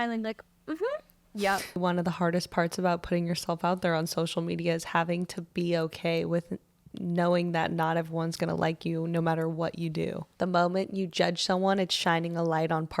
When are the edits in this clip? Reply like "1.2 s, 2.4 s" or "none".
1.8 s, 10.2 s